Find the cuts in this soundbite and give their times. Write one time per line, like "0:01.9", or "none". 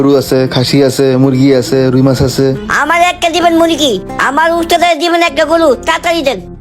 none